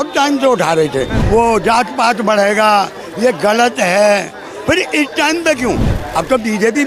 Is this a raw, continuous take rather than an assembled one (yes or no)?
no